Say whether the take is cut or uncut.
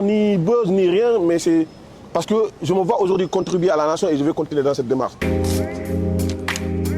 cut